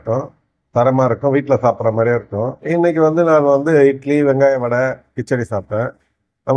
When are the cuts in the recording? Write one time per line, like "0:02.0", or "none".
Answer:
none

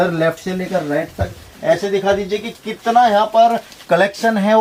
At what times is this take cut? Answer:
none

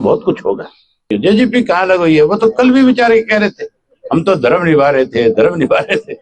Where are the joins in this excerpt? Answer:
0:01.0

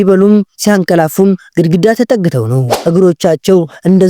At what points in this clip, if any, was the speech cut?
0:02.7

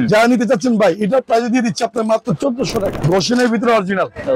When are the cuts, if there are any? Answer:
0:03.0

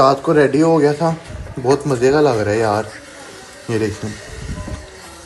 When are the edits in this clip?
none

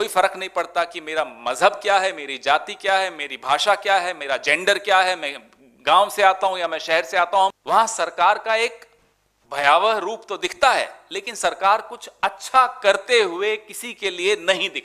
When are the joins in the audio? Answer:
0:07.6

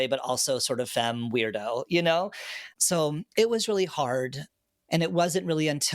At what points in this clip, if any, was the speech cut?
0:04.4

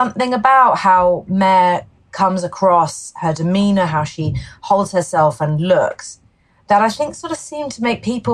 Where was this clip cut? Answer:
none

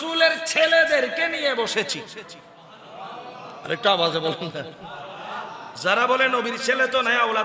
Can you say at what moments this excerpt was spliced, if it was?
none

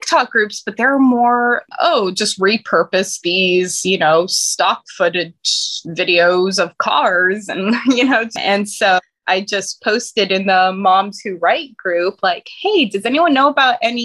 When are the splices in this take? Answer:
none

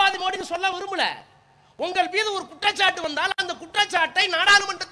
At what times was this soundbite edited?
none

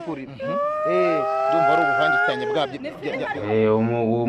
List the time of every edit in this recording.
0:03.3

